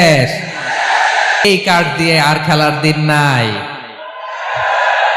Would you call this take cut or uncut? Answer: cut